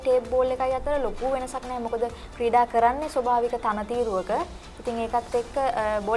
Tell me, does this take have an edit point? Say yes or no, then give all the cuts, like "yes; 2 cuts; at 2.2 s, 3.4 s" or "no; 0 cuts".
no; 0 cuts